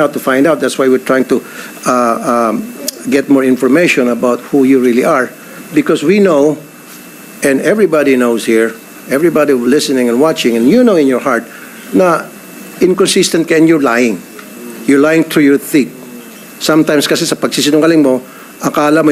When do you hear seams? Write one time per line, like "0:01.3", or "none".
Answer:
none